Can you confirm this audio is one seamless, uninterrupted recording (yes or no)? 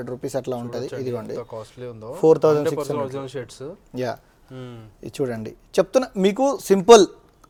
yes